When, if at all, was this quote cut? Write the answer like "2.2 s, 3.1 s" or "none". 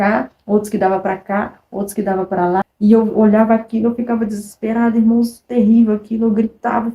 2.6 s